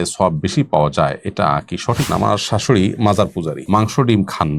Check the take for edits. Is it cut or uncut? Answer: cut